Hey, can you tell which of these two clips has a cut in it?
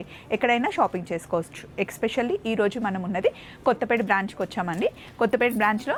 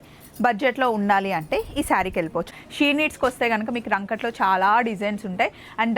second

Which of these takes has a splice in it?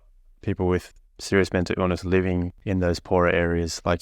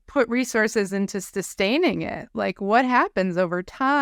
first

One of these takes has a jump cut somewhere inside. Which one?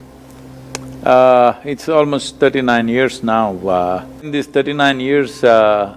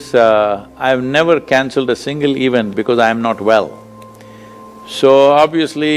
first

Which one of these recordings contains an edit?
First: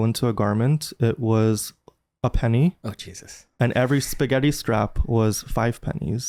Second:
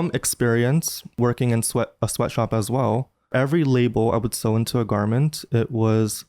second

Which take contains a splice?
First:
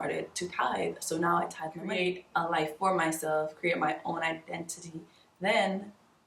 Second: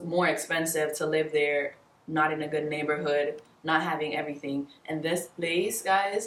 first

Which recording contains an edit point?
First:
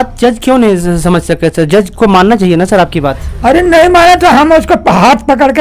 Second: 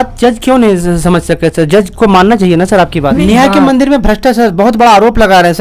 second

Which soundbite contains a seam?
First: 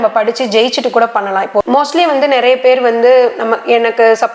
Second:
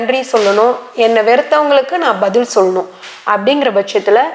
first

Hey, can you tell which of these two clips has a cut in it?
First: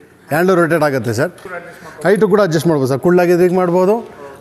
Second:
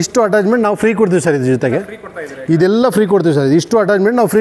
first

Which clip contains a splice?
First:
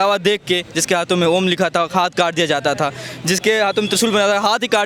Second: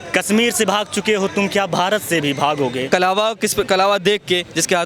second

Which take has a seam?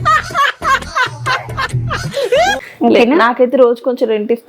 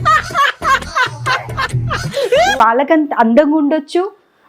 second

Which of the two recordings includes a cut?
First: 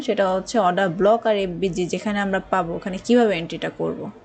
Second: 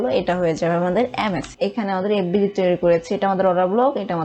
second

